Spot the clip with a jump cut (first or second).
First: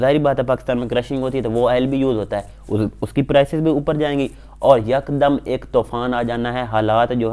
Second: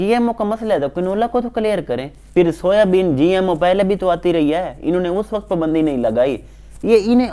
second